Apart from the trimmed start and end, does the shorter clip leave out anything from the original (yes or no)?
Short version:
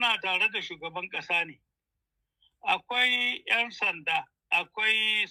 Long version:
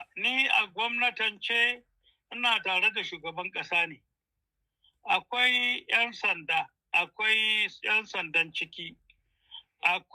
no